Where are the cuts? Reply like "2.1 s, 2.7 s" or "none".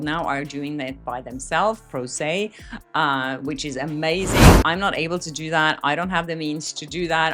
none